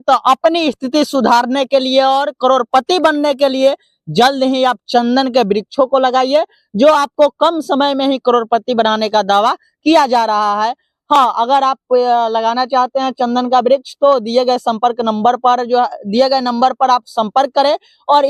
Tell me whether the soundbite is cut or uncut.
uncut